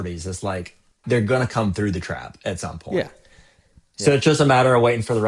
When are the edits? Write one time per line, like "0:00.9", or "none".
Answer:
0:01.0